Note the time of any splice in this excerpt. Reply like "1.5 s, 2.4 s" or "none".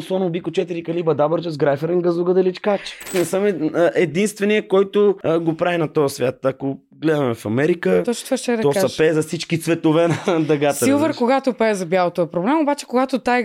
3.1 s, 5.2 s